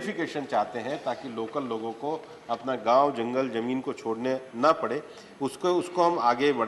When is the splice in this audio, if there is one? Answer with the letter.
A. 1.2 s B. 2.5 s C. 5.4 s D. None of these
D